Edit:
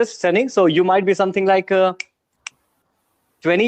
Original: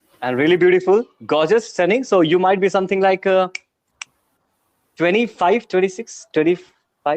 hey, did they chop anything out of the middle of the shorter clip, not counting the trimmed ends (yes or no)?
no